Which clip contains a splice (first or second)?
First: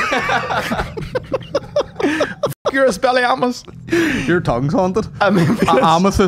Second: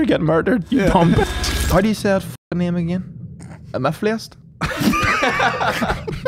second